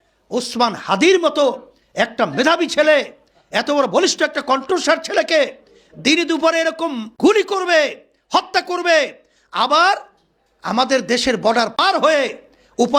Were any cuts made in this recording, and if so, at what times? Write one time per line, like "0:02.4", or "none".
0:07.0
0:11.8